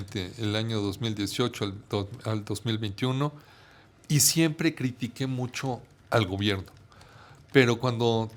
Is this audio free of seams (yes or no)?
yes